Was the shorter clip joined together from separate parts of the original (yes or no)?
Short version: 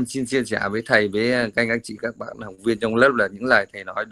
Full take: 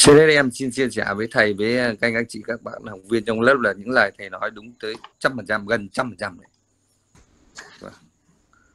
no